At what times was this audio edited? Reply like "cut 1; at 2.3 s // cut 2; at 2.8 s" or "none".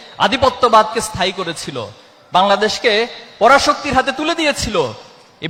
none